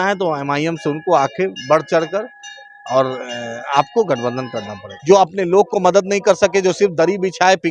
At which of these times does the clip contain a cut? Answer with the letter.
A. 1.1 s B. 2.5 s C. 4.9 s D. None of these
C